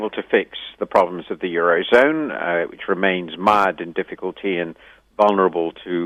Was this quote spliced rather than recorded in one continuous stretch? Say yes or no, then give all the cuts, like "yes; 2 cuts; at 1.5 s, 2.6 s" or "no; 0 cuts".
no; 0 cuts